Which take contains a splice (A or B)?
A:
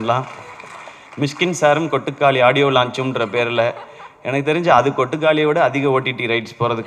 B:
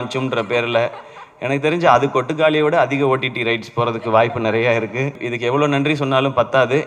B